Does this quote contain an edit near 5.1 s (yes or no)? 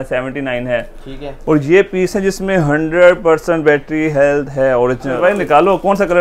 yes